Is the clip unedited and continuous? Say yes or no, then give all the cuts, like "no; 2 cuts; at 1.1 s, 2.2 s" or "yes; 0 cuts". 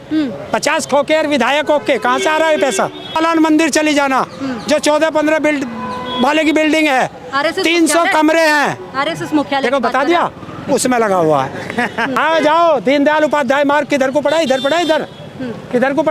no; 2 cuts; at 3.2 s, 12.1 s